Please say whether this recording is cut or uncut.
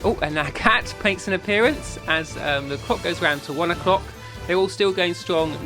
uncut